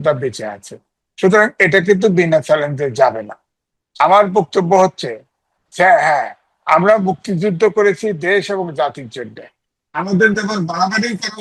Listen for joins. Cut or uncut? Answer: uncut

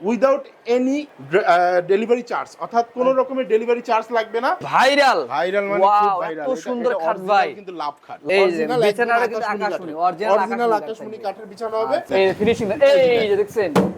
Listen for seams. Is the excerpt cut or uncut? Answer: cut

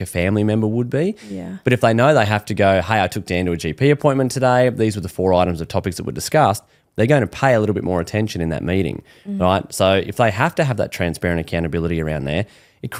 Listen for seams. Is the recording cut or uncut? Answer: uncut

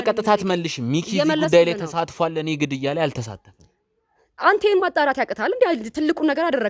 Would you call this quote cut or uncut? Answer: uncut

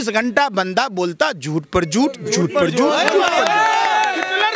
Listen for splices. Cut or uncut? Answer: uncut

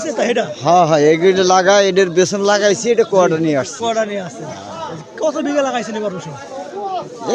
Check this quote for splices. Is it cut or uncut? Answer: uncut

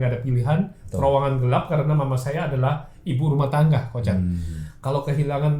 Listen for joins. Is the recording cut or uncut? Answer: uncut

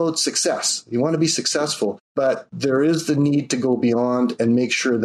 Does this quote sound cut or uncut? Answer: cut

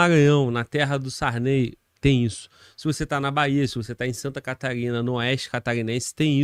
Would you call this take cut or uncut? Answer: uncut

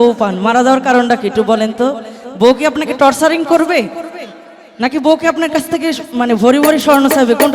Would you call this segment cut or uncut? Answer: uncut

